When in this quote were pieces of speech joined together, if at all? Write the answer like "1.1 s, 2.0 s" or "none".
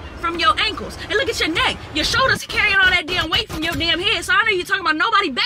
none